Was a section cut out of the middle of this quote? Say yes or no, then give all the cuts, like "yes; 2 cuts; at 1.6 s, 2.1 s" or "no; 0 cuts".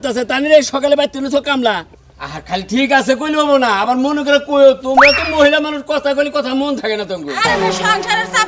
yes; 1 cut; at 1.9 s